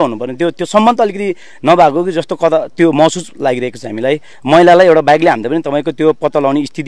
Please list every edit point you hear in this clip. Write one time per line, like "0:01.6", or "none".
0:04.3